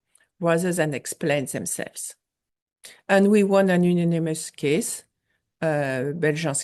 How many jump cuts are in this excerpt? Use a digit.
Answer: 0